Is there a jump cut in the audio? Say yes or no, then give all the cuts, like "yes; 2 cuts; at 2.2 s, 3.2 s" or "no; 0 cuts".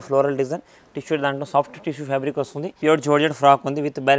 yes; 1 cut; at 2.8 s